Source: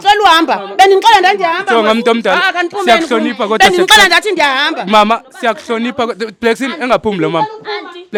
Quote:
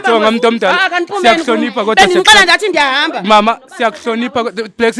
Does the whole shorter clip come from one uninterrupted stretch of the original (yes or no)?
yes